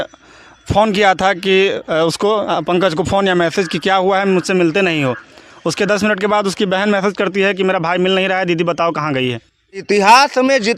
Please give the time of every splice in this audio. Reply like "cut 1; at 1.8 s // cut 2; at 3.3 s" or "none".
cut 1; at 9.8 s